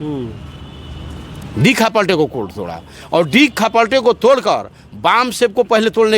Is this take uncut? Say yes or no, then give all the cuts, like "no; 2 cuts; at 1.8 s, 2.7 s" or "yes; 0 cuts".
yes; 0 cuts